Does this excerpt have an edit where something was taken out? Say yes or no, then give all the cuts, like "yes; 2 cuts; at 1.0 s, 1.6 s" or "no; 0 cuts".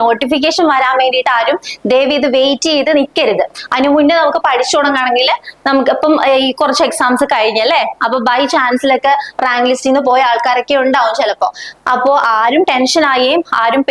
no; 0 cuts